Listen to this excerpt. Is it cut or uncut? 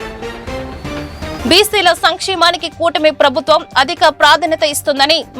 cut